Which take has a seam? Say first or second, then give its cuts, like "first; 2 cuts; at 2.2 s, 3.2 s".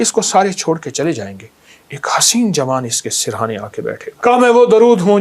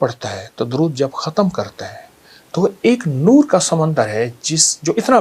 first; 1 cut; at 4.1 s